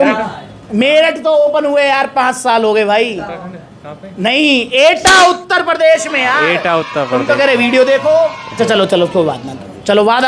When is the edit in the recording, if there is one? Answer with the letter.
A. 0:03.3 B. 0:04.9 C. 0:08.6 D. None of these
C